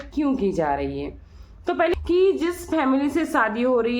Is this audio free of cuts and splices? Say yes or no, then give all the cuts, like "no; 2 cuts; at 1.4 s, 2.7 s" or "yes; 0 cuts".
no; 1 cut; at 2.0 s